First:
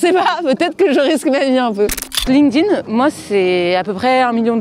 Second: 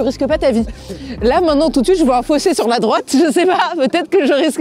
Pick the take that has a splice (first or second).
first